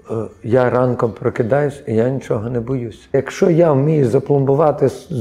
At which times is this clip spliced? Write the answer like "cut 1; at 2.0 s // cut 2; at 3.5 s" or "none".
cut 1; at 3.1 s